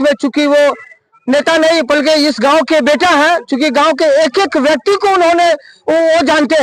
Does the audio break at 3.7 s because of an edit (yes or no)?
no